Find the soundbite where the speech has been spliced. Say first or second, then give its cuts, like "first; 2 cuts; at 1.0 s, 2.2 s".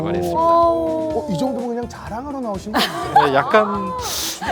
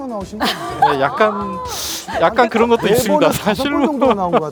first; 1 cut; at 1.1 s